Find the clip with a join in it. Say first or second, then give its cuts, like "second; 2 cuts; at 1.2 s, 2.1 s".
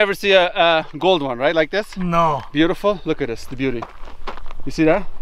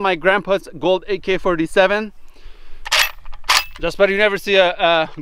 second; 1 cut; at 2.2 s